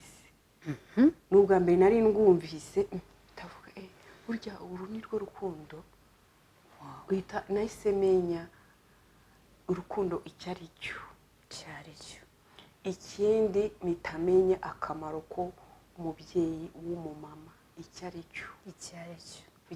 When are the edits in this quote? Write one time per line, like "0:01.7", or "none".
none